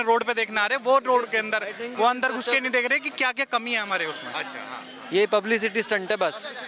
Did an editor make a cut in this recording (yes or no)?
no